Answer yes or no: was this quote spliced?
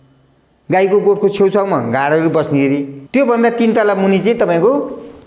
yes